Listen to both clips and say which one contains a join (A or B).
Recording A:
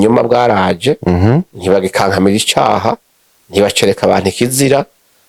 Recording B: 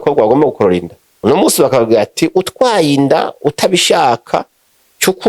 B